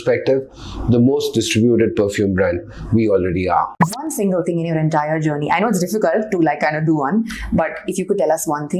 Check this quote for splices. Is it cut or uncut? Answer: cut